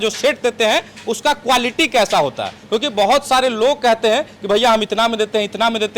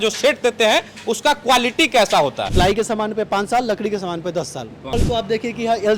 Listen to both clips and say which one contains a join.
second; 2 cuts; at 2.4 s, 4.7 s

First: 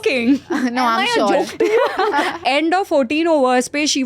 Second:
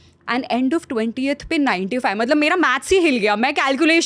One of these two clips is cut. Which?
first; 1 cut; at 2.4 s

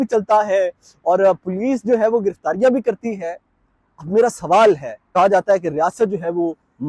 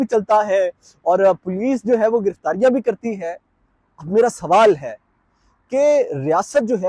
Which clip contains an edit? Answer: first; 1 cut; at 5.0 s

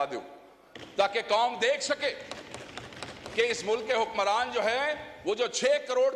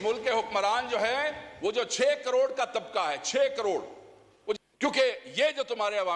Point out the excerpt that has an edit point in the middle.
second; 1 cut; at 4.6 s

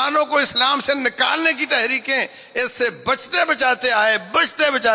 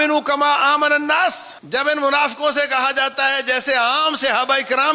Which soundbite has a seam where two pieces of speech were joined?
second; 1 cut; at 1.5 s

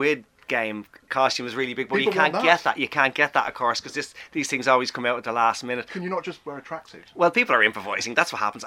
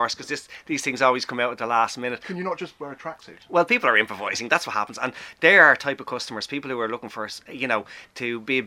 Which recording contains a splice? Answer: first; 1 cut; at 1.0 s

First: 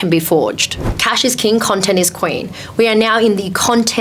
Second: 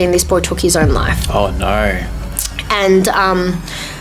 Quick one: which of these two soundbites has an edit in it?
first; 1 cut; at 1.0 s

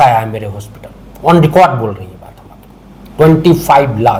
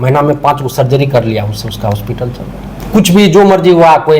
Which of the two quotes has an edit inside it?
second; 1 cut; at 2.8 s

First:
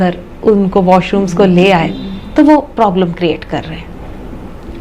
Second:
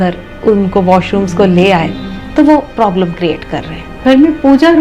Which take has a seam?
second; 1 cut; at 3.8 s

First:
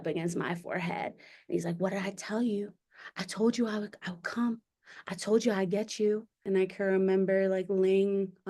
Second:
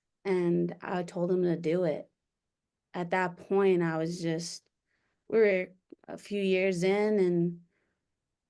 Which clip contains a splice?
first; 1 cut; at 6.3 s

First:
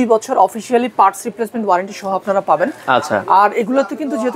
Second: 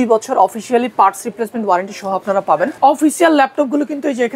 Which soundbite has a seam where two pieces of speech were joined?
second; 1 cut; at 2.7 s

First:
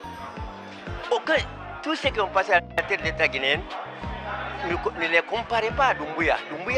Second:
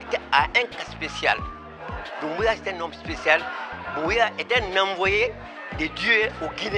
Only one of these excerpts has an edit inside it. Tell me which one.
first; 1 cut; at 2.8 s

